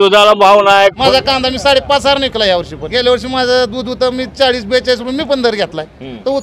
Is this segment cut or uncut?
cut